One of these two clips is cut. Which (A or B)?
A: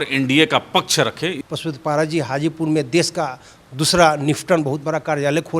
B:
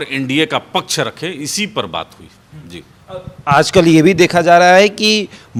A